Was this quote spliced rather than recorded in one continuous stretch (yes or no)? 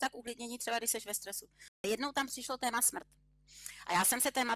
yes